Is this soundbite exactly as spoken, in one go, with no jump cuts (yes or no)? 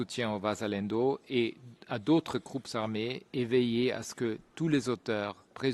yes